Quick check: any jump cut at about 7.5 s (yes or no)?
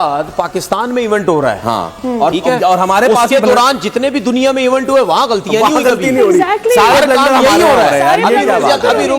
no